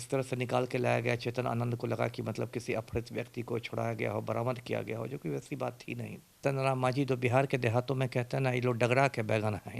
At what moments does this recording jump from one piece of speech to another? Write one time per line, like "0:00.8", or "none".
0:06.4